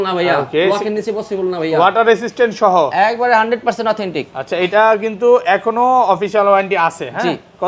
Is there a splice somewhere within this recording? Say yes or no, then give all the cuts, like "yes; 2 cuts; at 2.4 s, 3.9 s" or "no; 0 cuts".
no; 0 cuts